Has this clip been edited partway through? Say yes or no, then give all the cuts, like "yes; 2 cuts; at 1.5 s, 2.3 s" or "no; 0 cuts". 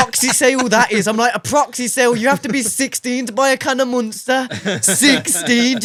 no; 0 cuts